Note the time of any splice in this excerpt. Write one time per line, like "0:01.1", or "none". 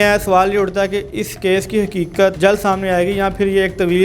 0:02.4